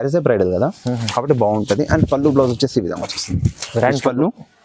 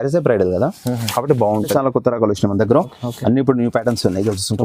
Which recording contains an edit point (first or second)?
second